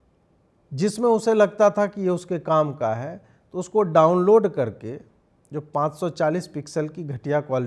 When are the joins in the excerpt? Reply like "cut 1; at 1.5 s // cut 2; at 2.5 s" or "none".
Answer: none